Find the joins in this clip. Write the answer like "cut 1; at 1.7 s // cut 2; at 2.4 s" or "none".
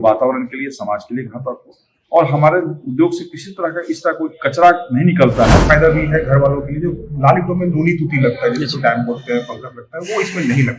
cut 1; at 5.6 s